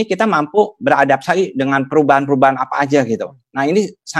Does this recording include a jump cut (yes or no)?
no